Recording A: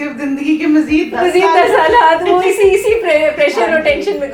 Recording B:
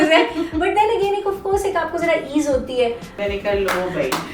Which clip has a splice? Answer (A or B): B